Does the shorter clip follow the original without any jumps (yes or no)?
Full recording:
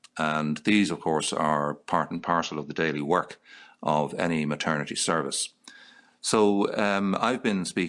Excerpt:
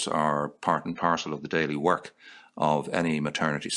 yes